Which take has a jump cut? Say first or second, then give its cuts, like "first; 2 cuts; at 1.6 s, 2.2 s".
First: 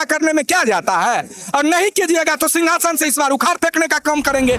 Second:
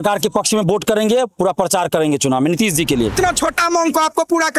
second; 1 cut; at 3.1 s